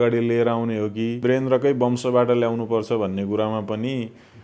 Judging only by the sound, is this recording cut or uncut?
cut